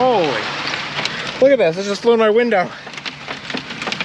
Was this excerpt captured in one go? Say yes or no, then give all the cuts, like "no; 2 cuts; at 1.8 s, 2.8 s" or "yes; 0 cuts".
yes; 0 cuts